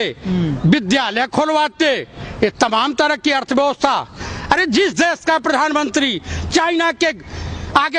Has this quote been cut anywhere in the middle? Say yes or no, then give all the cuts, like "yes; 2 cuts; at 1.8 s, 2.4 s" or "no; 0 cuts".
no; 0 cuts